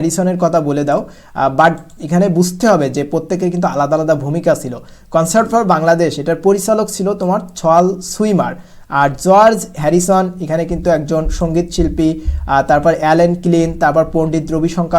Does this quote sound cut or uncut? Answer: uncut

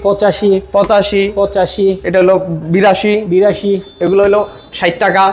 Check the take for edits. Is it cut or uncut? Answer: uncut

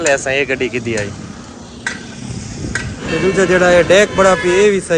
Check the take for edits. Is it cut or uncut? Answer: cut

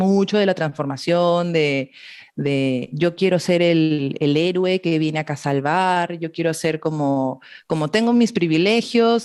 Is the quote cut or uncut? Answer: uncut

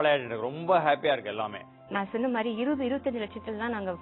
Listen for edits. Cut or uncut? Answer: cut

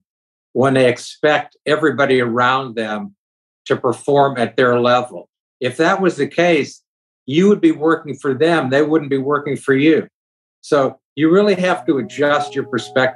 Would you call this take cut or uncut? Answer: uncut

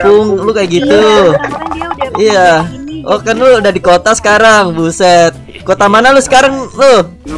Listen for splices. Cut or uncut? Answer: uncut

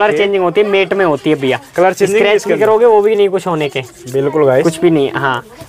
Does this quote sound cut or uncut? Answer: uncut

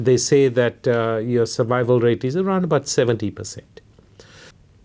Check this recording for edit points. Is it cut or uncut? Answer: uncut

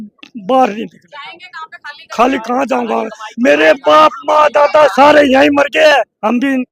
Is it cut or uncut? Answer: uncut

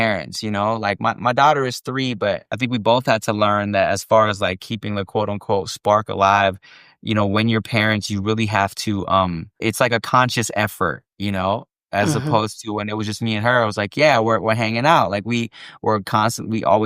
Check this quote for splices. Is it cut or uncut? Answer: cut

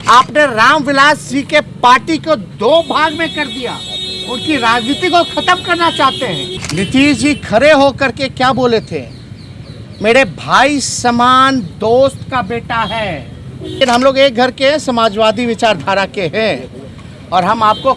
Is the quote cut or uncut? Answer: cut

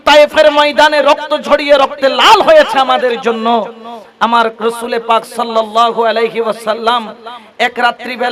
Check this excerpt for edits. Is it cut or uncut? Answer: uncut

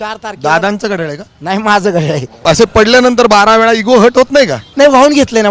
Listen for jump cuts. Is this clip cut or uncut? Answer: cut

